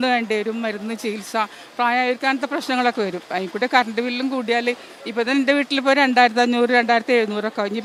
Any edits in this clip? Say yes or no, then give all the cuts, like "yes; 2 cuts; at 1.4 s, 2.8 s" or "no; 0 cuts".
no; 0 cuts